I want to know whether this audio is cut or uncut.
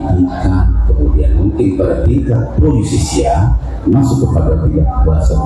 cut